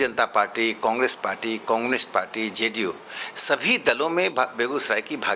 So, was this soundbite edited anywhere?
no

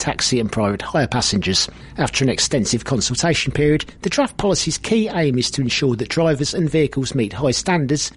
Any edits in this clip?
no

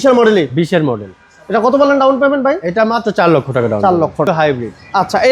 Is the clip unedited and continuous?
no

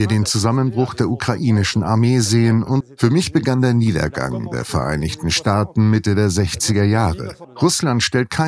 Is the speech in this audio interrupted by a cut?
yes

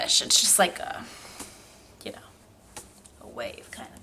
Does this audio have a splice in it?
no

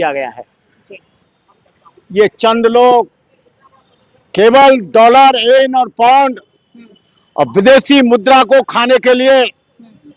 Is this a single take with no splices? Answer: no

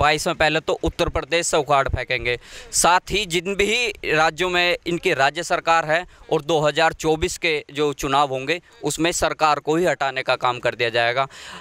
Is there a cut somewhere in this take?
no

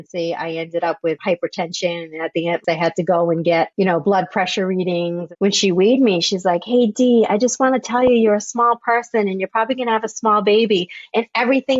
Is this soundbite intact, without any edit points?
no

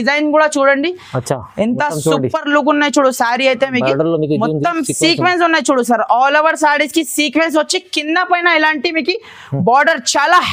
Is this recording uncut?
yes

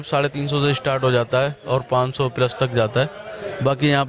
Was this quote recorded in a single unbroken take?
yes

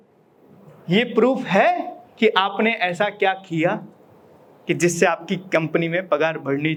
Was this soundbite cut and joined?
no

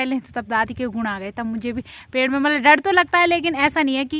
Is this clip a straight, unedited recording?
yes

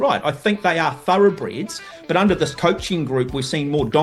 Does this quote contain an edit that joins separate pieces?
no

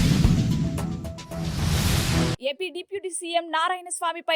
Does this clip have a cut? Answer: yes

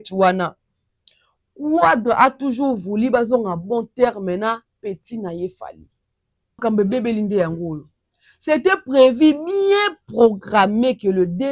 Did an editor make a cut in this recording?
yes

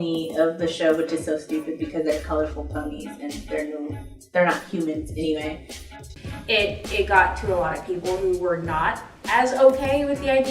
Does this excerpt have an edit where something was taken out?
yes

